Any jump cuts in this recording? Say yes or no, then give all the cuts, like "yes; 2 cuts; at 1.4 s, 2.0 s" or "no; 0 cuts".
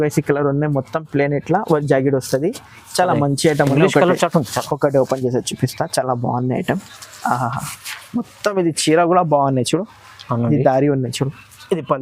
no; 0 cuts